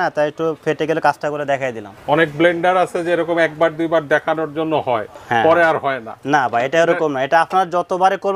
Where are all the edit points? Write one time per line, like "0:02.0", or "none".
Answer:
0:01.9